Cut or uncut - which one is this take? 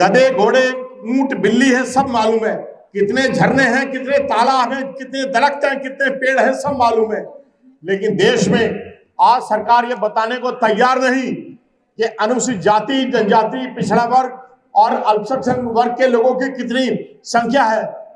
uncut